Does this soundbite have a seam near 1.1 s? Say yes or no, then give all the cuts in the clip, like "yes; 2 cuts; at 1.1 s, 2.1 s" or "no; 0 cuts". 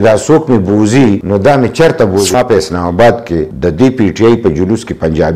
no; 1 cut; at 2.3 s